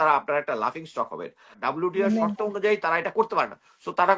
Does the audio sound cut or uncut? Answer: cut